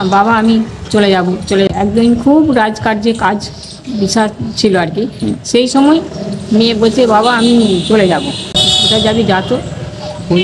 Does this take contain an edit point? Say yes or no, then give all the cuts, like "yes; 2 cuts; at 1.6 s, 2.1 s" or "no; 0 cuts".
yes; 2 cuts; at 1.7 s, 8.6 s